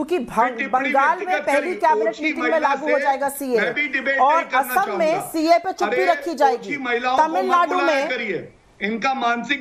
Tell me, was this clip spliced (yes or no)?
no